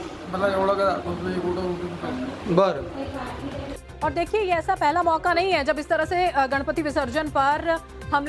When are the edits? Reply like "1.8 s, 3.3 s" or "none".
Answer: 1.4 s